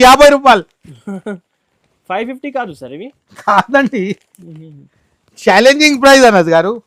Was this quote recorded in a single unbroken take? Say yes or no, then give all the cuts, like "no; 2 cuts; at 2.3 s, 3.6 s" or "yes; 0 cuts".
yes; 0 cuts